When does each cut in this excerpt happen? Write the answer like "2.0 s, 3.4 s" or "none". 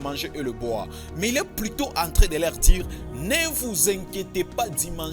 none